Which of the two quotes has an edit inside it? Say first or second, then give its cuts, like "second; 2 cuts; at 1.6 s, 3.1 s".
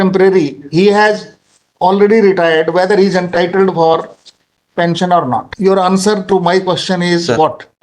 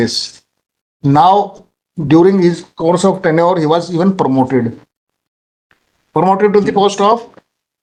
first; 1 cut; at 5.5 s